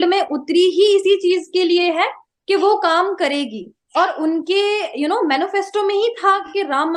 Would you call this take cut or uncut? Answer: uncut